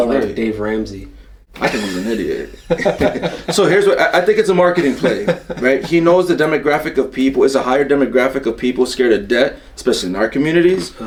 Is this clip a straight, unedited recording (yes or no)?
yes